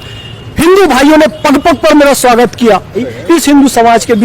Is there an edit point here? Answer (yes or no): yes